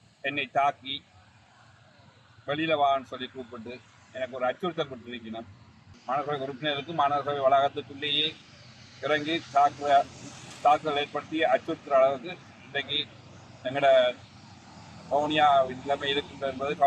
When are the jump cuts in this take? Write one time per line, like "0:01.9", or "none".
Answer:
0:05.9